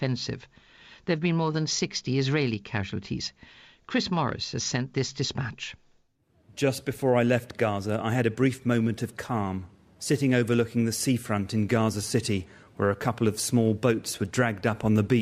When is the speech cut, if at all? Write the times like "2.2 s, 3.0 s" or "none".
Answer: 3.8 s